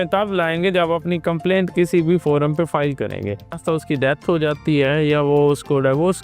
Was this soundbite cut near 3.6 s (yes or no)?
yes